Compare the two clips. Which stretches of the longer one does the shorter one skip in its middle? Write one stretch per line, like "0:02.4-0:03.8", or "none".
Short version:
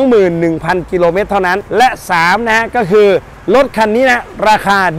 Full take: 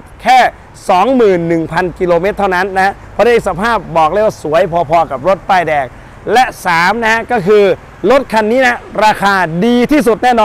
0:02.7-0:06.2